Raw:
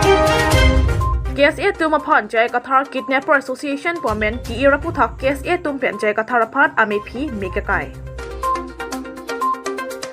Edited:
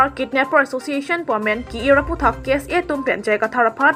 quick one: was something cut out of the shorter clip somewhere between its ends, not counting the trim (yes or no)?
no